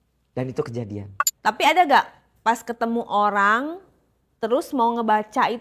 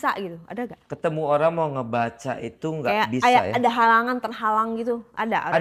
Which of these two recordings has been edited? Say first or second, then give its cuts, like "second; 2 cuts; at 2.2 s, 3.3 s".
first; 1 cut; at 1.3 s